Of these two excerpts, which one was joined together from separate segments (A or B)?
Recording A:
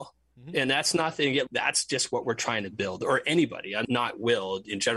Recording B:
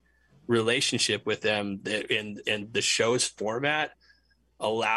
A